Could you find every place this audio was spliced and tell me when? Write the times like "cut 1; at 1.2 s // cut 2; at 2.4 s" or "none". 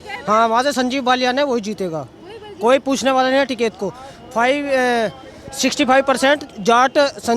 none